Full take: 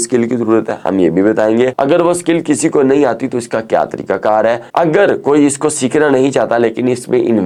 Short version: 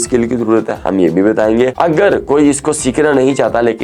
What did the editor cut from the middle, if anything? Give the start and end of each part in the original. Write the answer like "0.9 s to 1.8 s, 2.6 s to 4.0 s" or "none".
1.7 s to 4.7 s